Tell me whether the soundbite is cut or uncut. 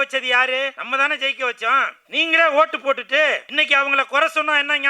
cut